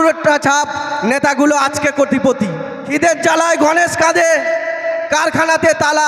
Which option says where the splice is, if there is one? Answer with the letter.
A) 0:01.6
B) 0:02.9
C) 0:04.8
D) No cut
B